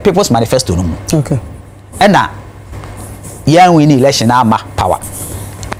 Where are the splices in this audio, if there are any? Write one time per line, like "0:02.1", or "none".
none